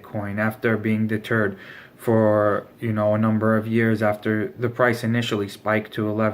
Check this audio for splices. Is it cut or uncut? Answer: cut